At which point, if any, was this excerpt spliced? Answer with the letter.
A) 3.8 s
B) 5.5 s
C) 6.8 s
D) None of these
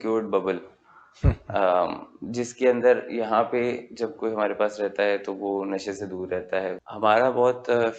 C